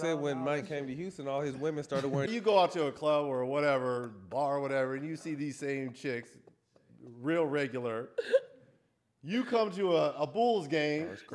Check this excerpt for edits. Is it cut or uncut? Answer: cut